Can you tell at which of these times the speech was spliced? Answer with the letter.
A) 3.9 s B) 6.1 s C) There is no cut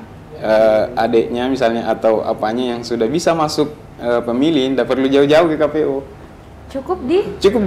C